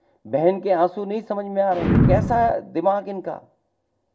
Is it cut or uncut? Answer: cut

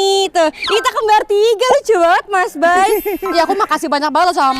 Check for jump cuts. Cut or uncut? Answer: uncut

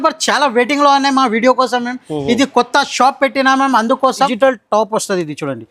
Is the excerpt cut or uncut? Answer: cut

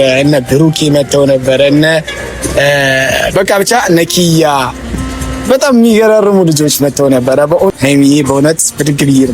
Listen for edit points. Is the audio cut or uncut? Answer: cut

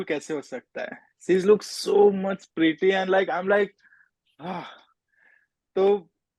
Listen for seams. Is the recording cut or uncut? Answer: uncut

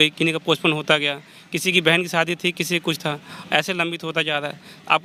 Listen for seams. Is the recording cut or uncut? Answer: uncut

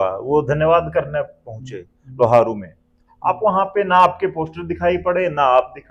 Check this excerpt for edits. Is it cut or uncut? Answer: uncut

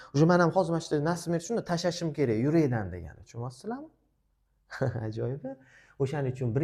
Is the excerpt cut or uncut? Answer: uncut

